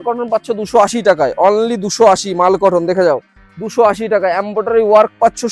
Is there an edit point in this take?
no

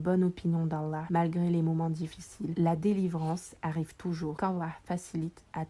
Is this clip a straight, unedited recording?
yes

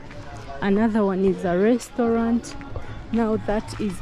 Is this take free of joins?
yes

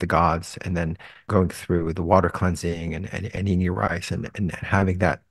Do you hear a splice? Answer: yes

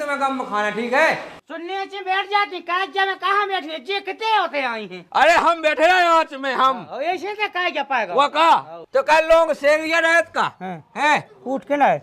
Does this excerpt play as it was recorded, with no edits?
no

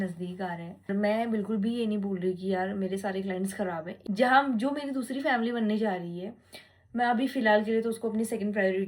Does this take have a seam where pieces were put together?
yes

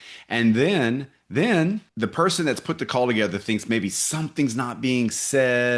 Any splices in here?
yes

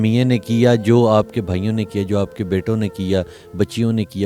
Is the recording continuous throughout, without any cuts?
yes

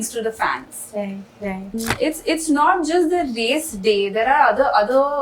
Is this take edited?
yes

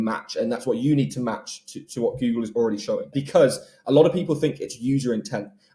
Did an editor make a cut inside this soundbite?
yes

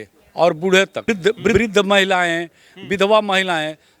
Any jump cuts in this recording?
yes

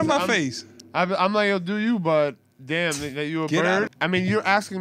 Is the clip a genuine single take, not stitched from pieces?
no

